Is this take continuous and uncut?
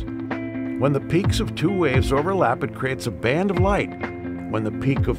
yes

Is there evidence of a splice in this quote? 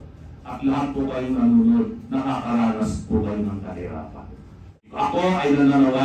yes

